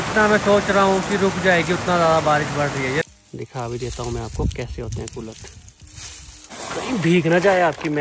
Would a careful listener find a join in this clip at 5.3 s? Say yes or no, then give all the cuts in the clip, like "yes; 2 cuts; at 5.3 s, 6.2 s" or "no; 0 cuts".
no; 2 cuts; at 3.0 s, 6.5 s